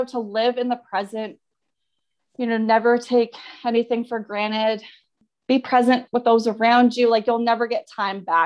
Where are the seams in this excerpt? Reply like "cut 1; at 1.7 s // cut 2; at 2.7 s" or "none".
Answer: cut 1; at 5.2 s